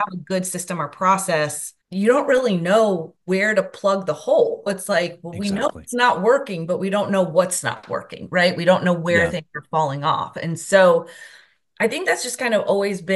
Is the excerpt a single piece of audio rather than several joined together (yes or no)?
yes